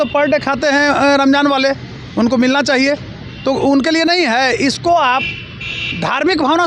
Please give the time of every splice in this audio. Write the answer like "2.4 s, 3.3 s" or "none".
none